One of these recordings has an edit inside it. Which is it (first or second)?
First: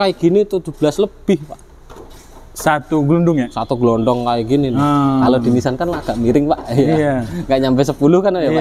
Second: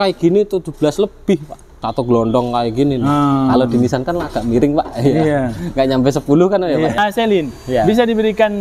second